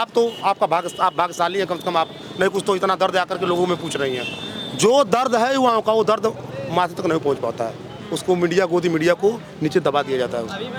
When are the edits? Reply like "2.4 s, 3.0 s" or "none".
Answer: none